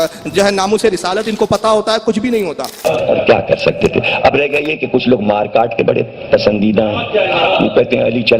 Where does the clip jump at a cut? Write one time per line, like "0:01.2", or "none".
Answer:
0:02.8